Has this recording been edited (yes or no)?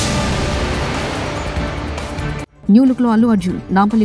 no